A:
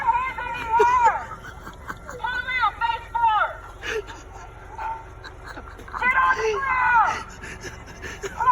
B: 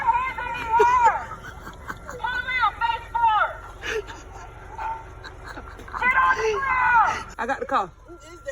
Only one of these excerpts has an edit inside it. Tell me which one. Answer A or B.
B